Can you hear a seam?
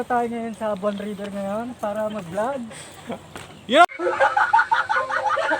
yes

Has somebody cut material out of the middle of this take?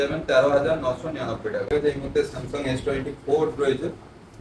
yes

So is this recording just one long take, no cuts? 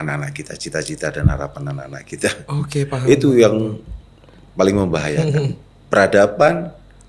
yes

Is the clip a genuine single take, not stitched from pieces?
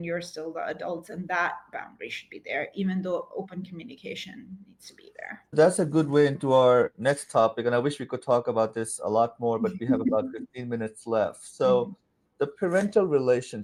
yes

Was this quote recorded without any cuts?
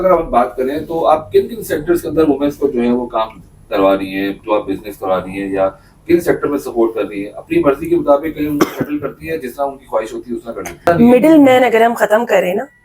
no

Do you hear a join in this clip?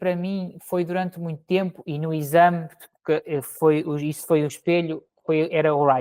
no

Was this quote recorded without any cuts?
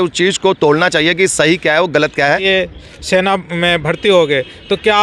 no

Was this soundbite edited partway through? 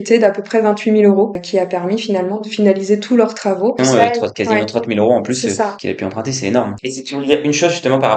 no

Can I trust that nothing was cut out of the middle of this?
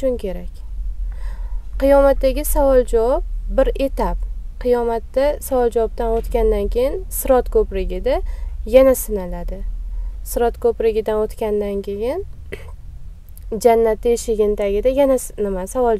yes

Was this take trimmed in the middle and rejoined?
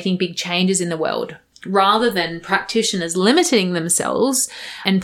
no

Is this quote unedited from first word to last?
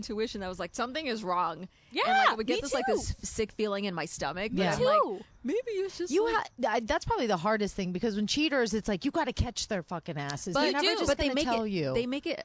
yes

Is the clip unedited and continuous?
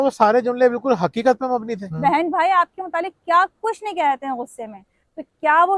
no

